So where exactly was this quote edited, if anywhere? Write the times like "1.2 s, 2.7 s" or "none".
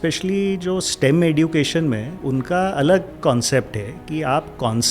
2.1 s